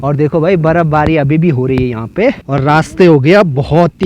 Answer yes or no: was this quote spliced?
yes